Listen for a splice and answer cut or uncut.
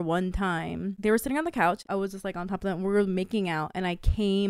cut